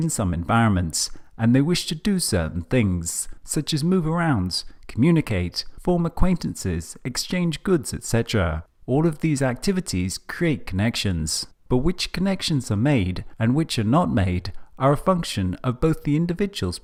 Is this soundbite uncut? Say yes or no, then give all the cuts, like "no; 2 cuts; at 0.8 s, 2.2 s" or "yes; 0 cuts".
yes; 0 cuts